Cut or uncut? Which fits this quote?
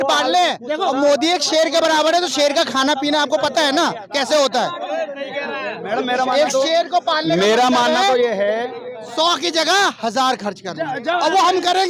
uncut